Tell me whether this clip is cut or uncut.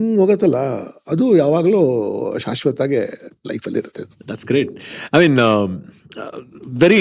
uncut